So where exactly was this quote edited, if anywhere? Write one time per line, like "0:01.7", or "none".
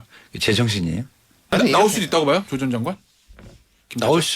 0:01.5